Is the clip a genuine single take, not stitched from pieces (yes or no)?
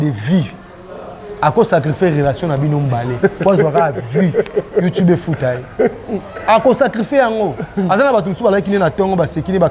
yes